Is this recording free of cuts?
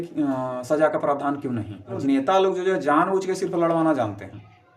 no; 1 cut; at 1.9 s

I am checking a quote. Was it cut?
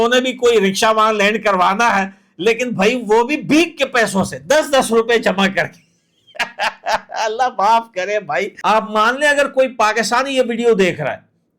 yes; 1 cut; at 8.6 s

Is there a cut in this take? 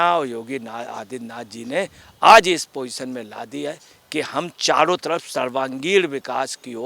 no; 0 cuts

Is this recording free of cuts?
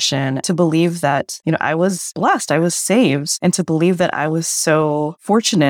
yes; 0 cuts

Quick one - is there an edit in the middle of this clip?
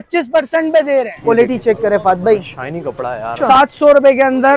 yes; 2 cuts; at 1.1 s, 3.3 s

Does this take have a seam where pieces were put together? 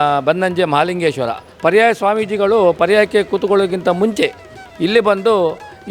yes; 1 cut; at 1.5 s

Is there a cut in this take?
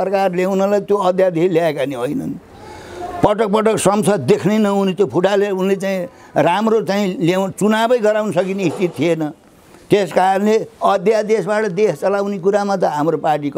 no; 0 cuts

